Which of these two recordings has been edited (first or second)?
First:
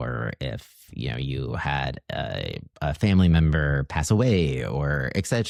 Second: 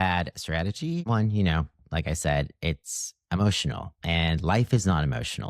second